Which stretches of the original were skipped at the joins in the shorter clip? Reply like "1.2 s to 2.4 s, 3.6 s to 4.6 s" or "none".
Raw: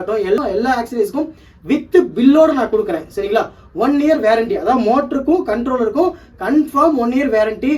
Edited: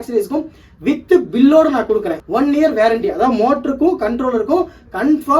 3.0 s to 3.6 s